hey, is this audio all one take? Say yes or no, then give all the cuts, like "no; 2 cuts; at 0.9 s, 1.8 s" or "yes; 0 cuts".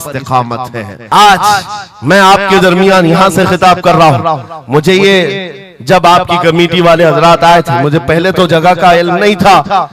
no; 1 cut; at 0.9 s